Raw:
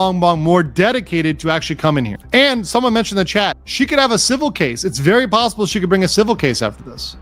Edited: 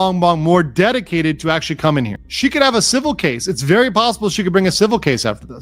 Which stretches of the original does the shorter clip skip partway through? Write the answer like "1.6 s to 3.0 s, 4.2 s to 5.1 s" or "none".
2.2 s to 3.6 s